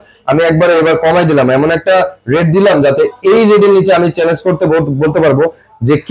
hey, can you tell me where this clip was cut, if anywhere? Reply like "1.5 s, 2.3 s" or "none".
none

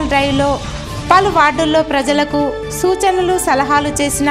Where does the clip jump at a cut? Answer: none

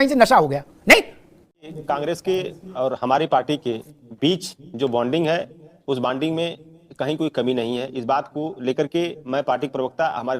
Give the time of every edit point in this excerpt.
1.8 s

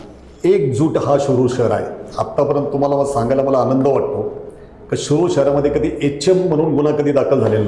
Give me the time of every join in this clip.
none

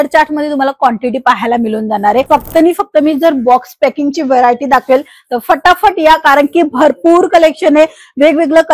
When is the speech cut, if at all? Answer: 2.3 s

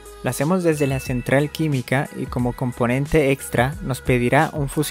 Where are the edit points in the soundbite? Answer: none

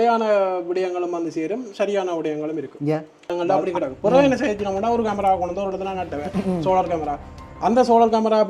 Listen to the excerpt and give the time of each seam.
3.3 s

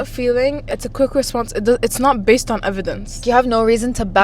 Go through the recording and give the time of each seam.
0.7 s, 3.2 s

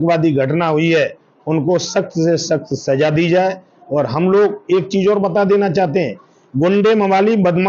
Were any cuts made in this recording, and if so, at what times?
none

